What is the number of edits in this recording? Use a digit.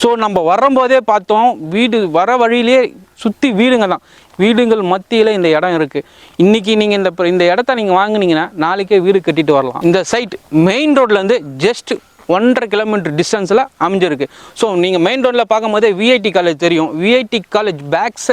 1